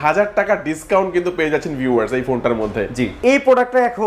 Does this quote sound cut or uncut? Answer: cut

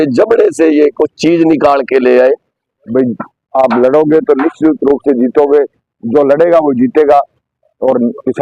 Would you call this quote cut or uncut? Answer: cut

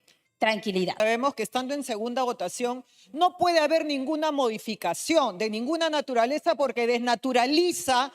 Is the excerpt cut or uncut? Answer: cut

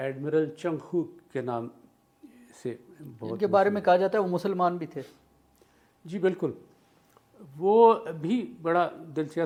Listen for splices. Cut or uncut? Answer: uncut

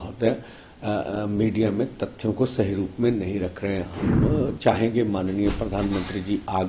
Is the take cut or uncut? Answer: uncut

